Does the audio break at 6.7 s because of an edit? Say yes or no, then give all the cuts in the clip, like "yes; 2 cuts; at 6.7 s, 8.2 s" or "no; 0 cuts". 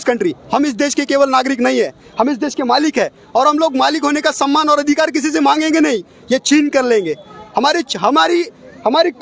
no; 0 cuts